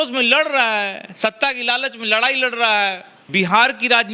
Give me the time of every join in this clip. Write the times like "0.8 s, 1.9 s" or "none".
3.1 s